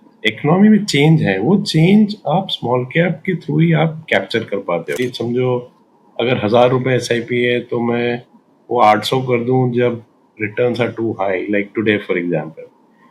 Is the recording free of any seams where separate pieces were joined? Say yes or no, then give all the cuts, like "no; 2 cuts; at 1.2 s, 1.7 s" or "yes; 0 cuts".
no; 1 cut; at 5.0 s